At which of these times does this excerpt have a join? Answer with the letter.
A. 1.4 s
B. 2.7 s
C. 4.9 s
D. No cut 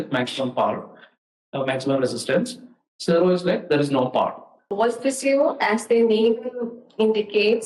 C